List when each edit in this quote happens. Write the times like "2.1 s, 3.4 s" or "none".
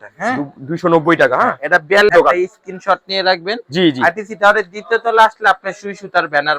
2.1 s